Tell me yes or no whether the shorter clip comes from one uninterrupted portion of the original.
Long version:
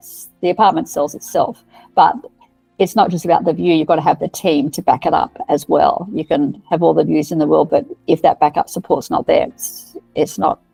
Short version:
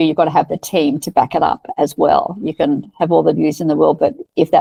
yes